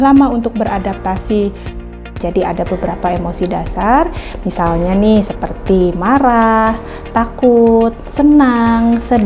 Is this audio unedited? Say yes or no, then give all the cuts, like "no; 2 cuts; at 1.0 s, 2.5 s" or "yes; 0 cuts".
no; 1 cut; at 1.8 s